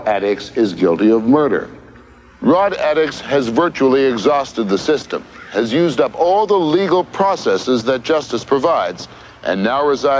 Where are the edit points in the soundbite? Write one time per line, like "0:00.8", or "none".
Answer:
none